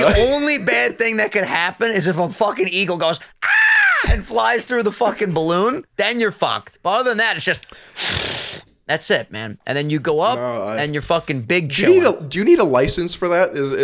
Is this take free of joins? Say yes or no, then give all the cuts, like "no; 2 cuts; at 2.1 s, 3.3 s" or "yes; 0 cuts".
no; 1 cut; at 6.7 s